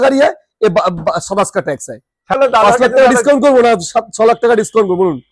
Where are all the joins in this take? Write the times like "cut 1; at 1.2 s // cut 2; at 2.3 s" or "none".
cut 1; at 2.4 s